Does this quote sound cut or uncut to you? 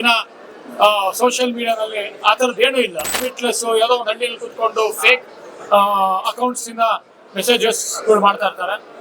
cut